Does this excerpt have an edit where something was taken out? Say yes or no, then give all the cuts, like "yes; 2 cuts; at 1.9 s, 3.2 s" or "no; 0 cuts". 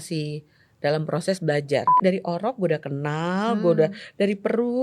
yes; 1 cut; at 1.9 s